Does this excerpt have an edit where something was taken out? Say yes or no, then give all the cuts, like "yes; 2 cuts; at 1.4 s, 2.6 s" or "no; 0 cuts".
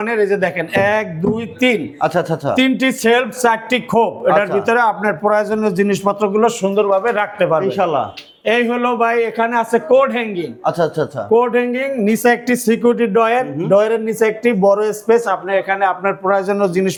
no; 0 cuts